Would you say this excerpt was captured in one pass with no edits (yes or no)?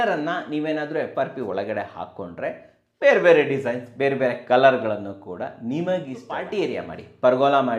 no